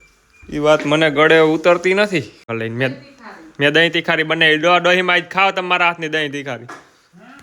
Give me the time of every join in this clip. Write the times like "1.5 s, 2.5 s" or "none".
2.5 s